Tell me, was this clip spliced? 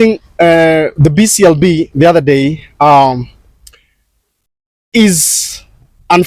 no; 0 cuts

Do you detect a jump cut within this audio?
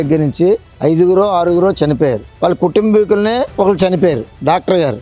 yes; 2 cuts; at 2.3 s, 3.5 s

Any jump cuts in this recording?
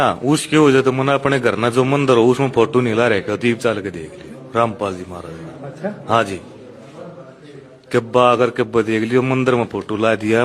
no; 0 cuts

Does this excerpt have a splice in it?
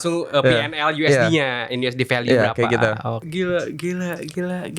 yes; 1 cut; at 3.2 s

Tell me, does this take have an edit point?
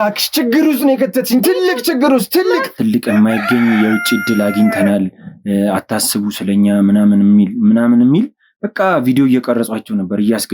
yes; 1 cut; at 2.7 s

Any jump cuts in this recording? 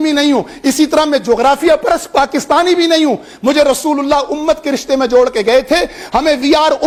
no; 0 cuts

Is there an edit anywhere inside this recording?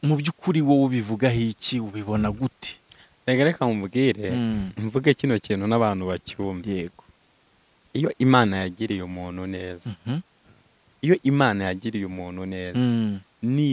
no; 0 cuts

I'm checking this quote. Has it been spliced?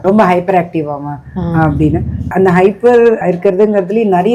no; 0 cuts

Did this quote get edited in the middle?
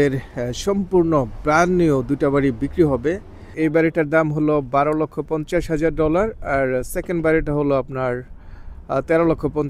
yes; 1 cut; at 3.5 s

